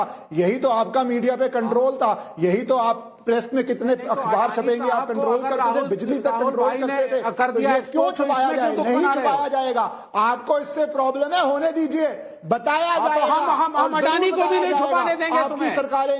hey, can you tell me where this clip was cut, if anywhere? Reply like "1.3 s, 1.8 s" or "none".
none